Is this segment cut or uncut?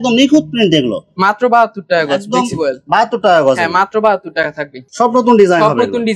uncut